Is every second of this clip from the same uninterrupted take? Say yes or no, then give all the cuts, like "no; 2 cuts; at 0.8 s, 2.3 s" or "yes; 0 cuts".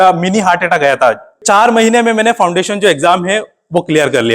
no; 1 cut; at 1.3 s